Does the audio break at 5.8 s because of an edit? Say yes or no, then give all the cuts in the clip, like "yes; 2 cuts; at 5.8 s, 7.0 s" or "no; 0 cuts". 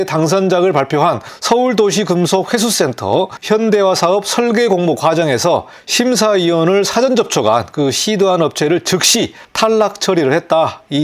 yes; 4 cuts; at 1.3 s, 3.4 s, 5.8 s, 9.4 s